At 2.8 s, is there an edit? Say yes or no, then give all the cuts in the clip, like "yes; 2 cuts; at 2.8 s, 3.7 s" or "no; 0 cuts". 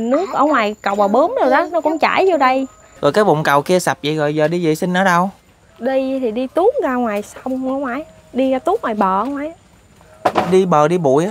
yes; 1 cut; at 2.8 s